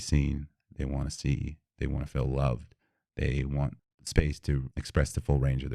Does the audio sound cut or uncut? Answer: cut